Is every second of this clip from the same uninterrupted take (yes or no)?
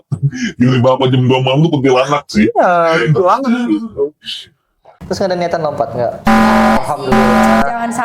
yes